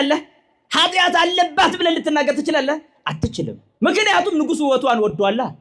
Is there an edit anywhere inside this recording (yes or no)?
no